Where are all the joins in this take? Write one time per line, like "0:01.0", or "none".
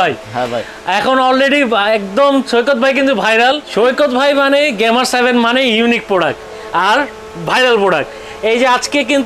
0:03.6